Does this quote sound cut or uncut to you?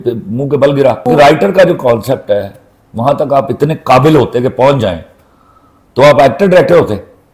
cut